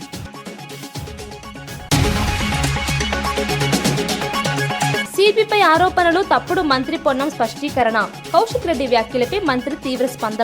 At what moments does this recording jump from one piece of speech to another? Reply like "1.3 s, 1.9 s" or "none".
1.8 s, 5.0 s